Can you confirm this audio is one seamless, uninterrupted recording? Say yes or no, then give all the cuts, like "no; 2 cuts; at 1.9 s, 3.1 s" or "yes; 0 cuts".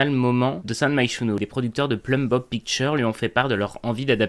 yes; 0 cuts